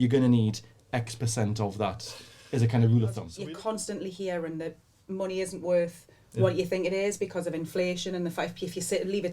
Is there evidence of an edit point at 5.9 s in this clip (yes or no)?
no